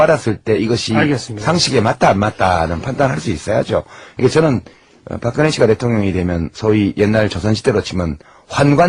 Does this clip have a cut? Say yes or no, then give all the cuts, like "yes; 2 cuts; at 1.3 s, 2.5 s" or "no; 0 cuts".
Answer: no; 0 cuts